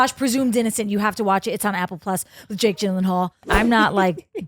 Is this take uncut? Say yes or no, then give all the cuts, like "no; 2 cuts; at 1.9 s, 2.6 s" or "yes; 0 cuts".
no; 1 cut; at 3.5 s